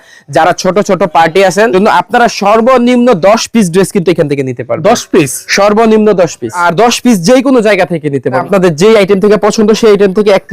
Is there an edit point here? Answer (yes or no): yes